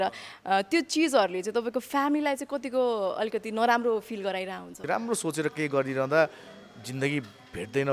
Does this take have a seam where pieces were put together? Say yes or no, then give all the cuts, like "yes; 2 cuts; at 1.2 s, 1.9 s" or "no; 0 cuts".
yes; 1 cut; at 4.7 s